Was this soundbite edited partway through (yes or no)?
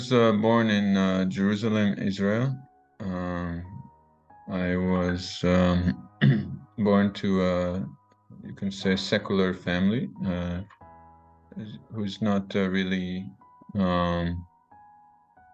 no